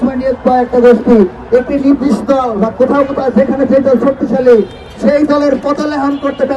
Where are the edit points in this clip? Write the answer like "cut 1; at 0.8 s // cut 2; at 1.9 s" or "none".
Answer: none